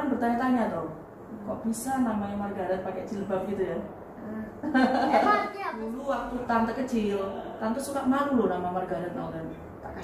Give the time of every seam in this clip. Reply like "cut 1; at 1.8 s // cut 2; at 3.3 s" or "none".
cut 1; at 5.8 s

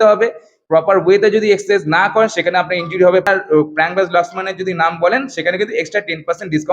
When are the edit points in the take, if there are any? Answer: cut 1; at 3.3 s

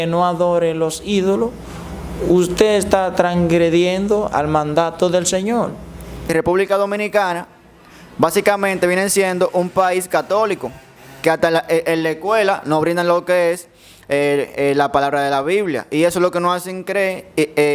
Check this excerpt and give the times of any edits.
cut 1; at 6.3 s

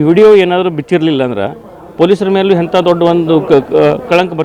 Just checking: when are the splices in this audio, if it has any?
none

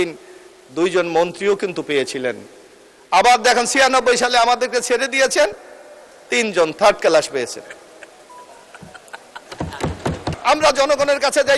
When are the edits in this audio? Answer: cut 1; at 10.3 s

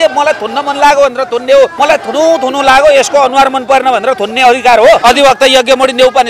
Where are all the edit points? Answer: cut 1; at 1.7 s // cut 2; at 5.0 s

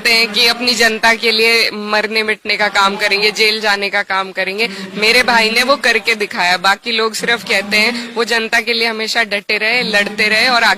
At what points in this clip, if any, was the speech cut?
none

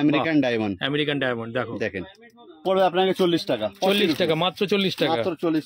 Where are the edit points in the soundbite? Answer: cut 1; at 2.6 s

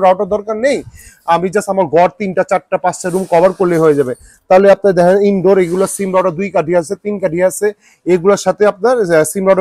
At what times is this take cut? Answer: none

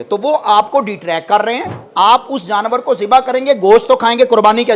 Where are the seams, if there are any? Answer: cut 1; at 1.8 s

